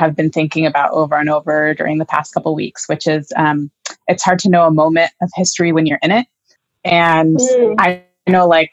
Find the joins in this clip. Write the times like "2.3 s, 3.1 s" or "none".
none